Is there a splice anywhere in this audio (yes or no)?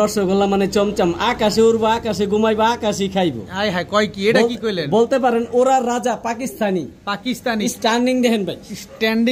no